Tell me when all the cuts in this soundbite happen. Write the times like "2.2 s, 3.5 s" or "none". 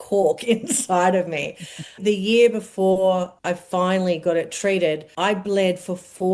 2.0 s, 3.4 s, 5.1 s